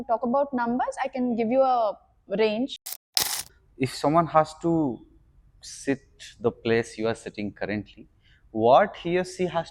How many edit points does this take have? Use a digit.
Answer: 1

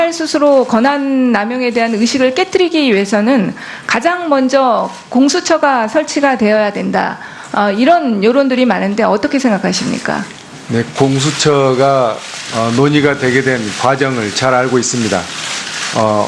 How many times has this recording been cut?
1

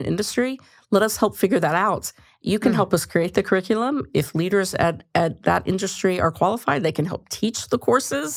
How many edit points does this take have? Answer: 0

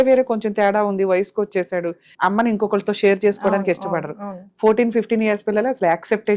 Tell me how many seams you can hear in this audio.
1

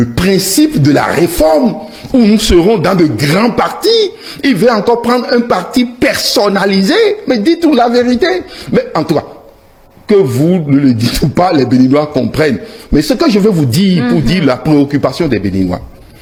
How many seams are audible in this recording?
0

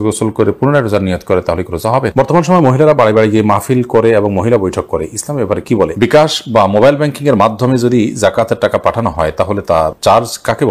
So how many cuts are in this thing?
2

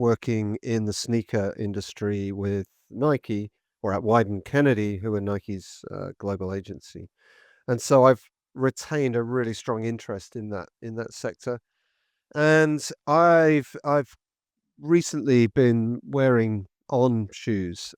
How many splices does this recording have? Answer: 0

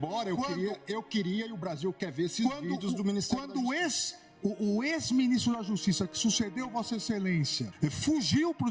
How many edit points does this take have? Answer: 1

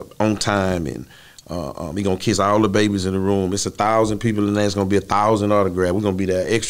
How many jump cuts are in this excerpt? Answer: 0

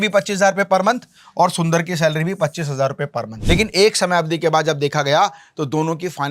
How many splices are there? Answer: 1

